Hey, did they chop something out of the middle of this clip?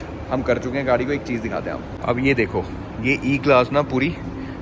no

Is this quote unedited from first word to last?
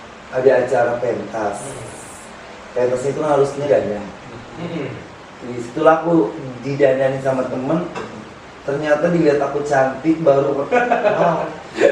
yes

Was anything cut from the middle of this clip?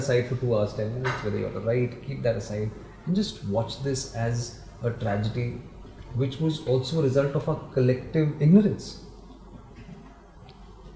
no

